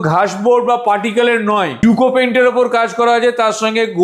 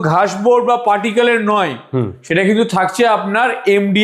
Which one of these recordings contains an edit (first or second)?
first